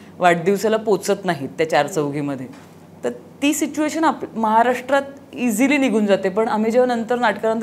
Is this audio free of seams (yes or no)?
yes